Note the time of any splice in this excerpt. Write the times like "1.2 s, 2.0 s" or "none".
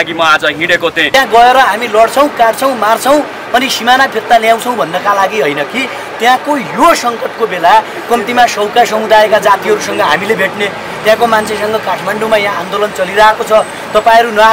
1.0 s

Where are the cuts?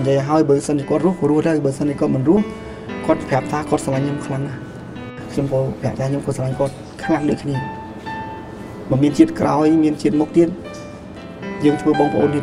5.2 s

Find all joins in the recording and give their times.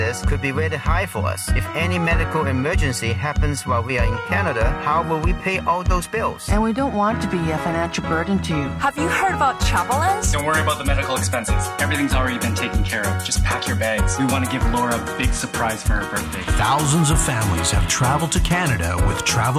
none

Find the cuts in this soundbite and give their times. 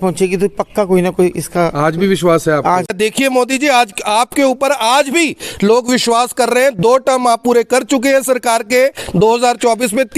2.9 s

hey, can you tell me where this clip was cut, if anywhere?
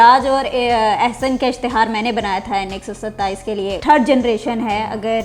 3.8 s

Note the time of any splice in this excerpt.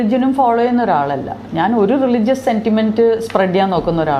none

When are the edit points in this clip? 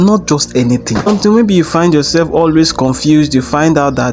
1.1 s

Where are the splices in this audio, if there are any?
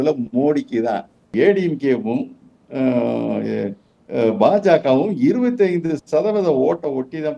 1.2 s

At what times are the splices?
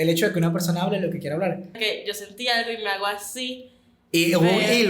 1.7 s

